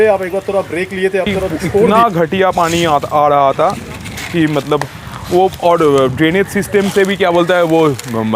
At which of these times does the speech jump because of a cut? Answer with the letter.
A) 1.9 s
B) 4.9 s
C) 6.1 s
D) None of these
A